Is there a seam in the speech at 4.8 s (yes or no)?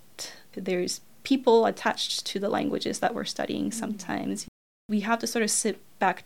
yes